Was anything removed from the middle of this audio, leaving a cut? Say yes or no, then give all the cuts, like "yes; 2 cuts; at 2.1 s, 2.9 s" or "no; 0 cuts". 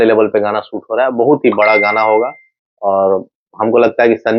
no; 0 cuts